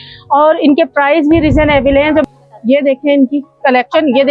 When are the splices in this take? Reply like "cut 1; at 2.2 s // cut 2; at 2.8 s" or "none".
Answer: cut 1; at 2.2 s